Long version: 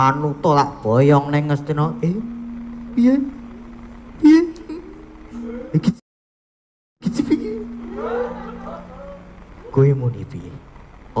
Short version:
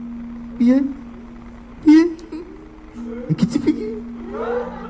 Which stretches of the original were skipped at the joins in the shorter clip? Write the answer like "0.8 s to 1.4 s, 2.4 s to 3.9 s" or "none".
5.6 s to 6.8 s